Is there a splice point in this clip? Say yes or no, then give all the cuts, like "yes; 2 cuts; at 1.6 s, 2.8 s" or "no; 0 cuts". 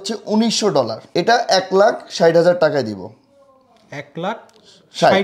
yes; 1 cut; at 1.0 s